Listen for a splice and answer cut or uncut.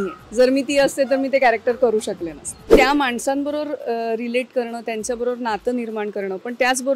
cut